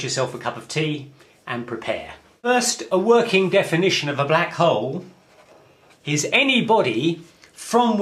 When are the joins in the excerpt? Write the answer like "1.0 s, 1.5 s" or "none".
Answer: none